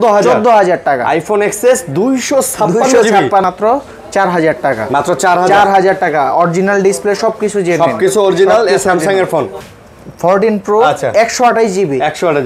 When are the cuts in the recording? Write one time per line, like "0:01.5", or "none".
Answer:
0:03.4
0:09.6